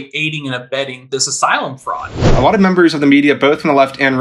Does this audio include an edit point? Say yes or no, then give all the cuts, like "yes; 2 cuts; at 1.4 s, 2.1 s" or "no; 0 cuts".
yes; 1 cut; at 2.4 s